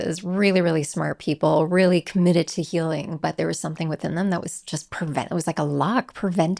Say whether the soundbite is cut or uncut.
uncut